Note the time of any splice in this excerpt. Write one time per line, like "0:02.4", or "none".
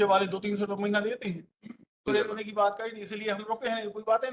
0:02.1